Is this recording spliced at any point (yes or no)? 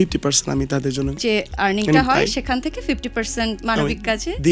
yes